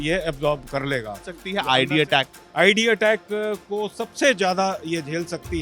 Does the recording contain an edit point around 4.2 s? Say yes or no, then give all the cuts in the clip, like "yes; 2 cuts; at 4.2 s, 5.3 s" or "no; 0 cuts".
no; 1 cut; at 1.4 s